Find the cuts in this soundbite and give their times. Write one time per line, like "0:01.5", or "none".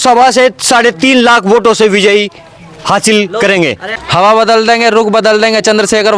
0:03.9